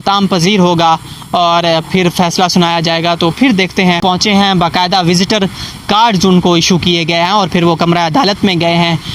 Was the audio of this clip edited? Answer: yes; 1 cut; at 4.0 s

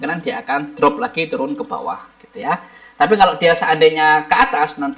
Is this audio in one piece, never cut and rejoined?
yes; 0 cuts

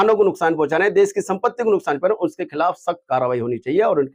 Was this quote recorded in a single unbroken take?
yes; 0 cuts

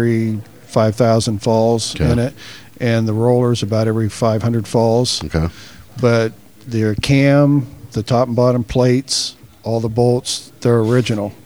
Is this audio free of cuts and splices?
yes; 0 cuts

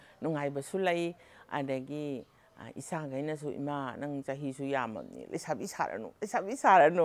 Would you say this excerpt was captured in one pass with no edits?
yes; 0 cuts

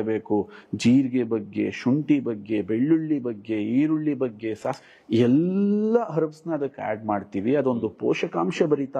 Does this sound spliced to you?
no; 0 cuts

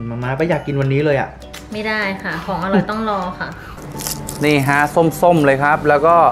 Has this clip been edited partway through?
yes; 1 cut; at 3.6 s

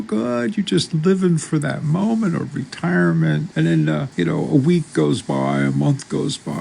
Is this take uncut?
no; 1 cut; at 4.1 s

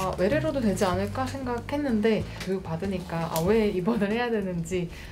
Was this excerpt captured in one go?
yes; 0 cuts

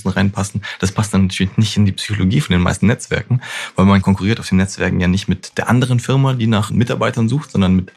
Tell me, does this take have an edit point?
yes; 2 cuts; at 4.0 s, 6.7 s

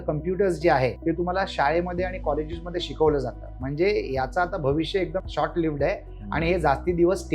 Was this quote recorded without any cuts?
no; 2 cuts; at 1.0 s, 5.3 s

